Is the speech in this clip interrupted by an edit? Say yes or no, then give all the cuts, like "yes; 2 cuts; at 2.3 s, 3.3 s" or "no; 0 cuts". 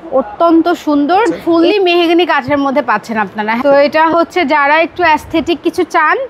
yes; 2 cuts; at 1.4 s, 3.6 s